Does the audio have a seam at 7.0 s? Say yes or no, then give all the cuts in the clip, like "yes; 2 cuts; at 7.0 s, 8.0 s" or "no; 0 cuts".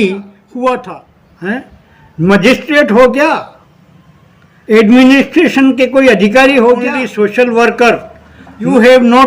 yes; 2 cuts; at 0.8 s, 7.0 s